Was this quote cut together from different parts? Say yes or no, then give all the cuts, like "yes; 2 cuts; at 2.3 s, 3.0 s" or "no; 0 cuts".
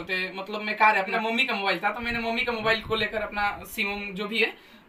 yes; 1 cut; at 1.1 s